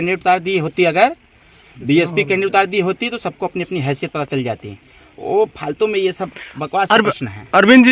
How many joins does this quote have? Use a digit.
0